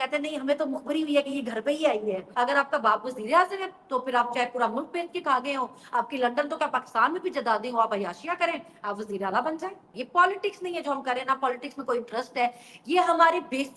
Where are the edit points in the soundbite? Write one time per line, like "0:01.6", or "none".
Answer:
0:02.2
0:09.9